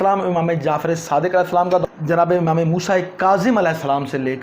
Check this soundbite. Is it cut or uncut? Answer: cut